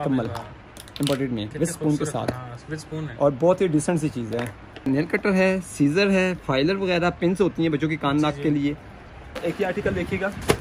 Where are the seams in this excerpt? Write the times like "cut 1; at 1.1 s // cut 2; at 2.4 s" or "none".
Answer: cut 1; at 4.9 s // cut 2; at 9.3 s